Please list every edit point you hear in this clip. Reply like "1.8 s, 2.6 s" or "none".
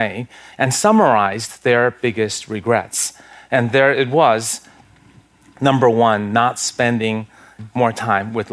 7.6 s